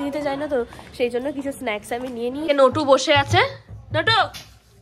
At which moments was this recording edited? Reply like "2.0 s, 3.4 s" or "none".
2.5 s